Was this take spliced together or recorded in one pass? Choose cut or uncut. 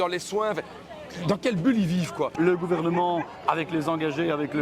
cut